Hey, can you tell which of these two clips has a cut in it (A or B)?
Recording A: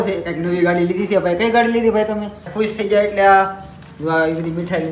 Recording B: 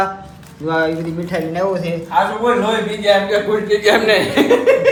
A